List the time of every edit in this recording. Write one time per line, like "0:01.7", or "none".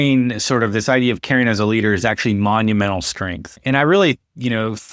0:03.6